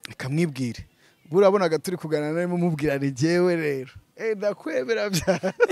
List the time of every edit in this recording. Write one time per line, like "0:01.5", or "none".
none